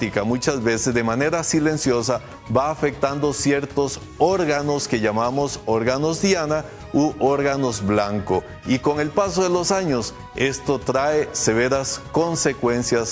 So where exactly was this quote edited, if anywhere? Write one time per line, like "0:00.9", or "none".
none